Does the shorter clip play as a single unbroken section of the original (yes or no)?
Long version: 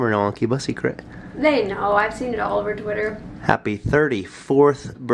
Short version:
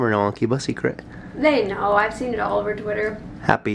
yes